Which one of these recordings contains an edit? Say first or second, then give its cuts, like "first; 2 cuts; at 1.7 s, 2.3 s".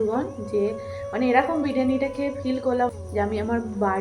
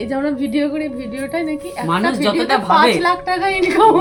first; 1 cut; at 2.9 s